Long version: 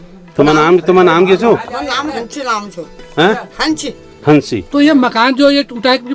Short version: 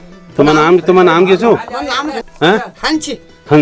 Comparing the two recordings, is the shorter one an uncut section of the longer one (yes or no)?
no